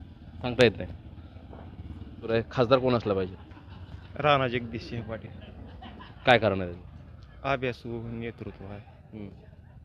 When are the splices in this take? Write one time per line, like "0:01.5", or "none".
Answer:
0:02.3